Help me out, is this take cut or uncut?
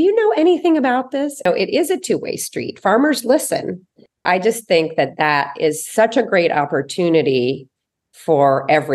cut